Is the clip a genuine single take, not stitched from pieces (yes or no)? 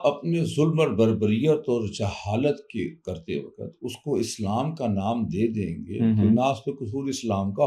yes